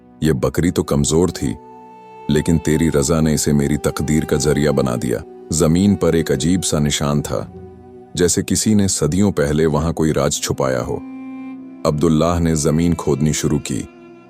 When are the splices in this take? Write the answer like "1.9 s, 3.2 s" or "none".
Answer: 5.4 s